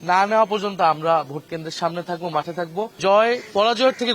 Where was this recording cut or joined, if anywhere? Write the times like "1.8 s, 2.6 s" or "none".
3.0 s